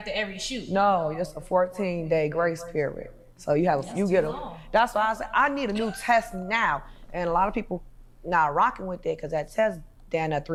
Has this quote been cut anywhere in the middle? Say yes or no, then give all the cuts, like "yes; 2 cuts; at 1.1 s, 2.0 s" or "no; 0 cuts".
no; 0 cuts